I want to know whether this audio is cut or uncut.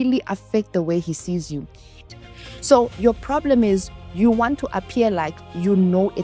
cut